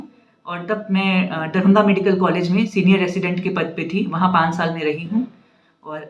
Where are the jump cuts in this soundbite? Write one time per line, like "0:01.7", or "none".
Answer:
none